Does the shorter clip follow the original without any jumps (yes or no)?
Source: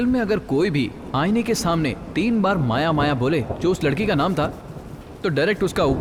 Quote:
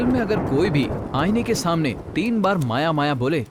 yes